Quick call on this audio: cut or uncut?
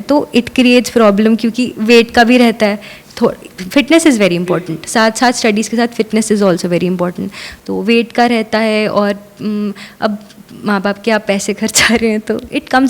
uncut